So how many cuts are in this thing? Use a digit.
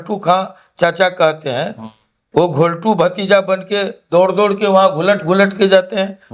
0